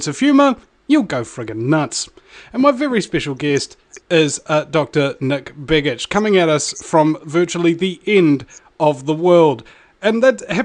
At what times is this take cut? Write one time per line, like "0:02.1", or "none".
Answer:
none